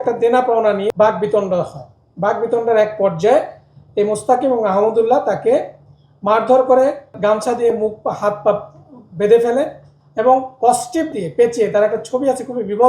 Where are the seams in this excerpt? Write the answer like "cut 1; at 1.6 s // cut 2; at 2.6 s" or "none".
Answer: cut 1; at 0.9 s // cut 2; at 7.1 s